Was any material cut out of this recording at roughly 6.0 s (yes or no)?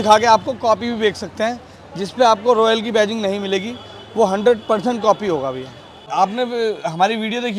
yes